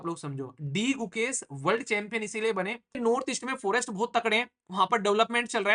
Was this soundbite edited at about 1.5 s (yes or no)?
no